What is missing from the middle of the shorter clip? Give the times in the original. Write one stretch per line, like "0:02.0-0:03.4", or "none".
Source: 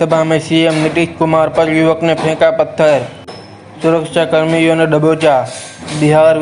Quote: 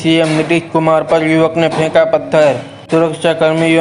0:03.2-0:03.6